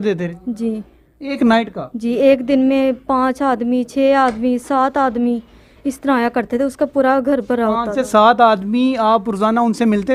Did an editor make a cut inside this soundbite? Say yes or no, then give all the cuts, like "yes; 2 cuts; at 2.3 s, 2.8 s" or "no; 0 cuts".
no; 0 cuts